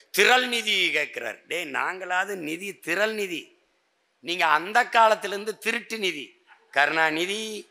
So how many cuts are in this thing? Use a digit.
0